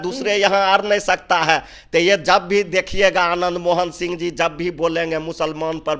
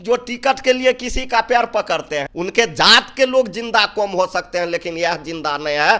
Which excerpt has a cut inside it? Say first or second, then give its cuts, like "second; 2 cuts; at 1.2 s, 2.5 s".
second; 1 cut; at 2.3 s